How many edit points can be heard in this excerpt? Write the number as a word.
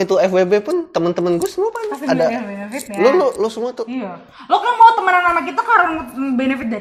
zero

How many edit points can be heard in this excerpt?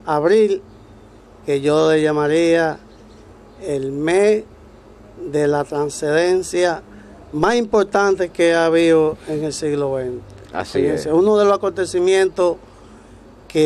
one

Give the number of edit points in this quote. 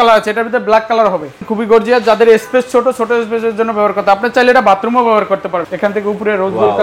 two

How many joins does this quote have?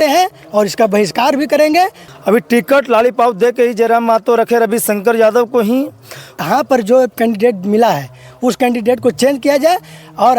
two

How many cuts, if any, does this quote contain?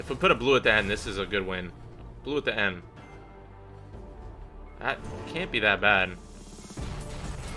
zero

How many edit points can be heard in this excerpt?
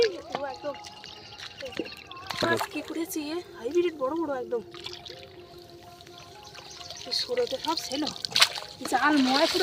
zero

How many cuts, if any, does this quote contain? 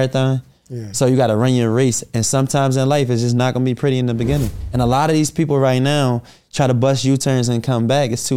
one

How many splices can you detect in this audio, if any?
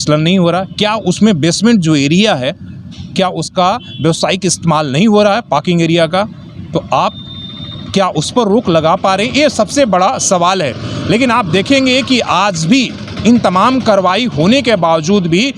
zero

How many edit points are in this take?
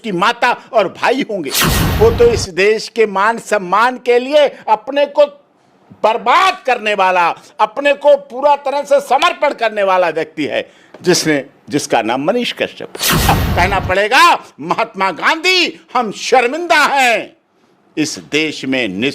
two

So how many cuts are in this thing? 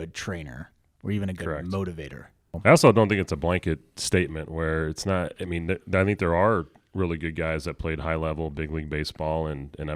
one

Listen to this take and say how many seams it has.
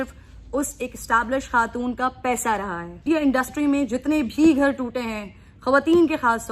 one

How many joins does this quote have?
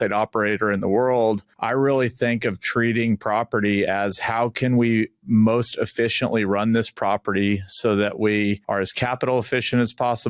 two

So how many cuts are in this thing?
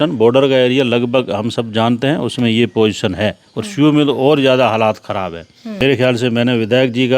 one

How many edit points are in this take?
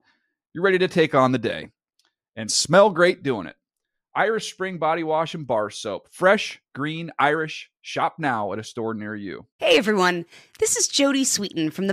one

